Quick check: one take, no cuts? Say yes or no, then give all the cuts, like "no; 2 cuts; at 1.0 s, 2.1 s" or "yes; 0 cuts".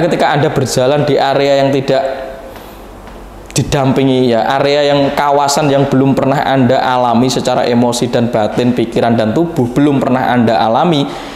yes; 0 cuts